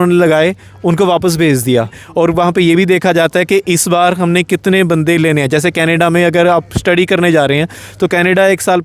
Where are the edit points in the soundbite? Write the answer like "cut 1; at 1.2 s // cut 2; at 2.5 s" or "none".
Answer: cut 1; at 2.0 s